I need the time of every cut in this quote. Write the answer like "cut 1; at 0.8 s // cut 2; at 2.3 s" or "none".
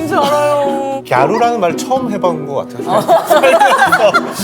cut 1; at 1.0 s